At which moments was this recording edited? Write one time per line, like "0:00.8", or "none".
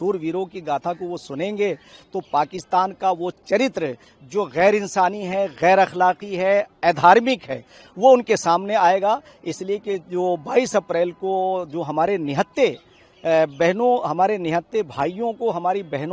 none